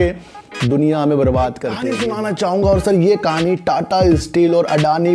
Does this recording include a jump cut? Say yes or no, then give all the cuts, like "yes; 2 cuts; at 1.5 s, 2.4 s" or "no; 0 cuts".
yes; 1 cut; at 1.9 s